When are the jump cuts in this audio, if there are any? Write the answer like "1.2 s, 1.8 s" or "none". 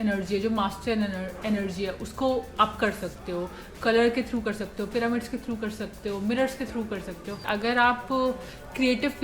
7.4 s